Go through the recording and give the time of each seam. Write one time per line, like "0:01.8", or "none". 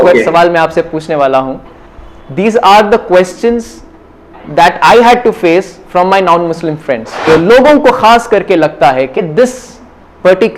0:07.2